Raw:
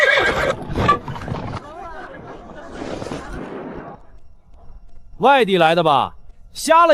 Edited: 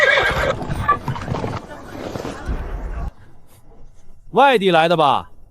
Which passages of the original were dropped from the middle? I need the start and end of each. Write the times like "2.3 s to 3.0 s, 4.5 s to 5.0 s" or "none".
1.6 s to 2.5 s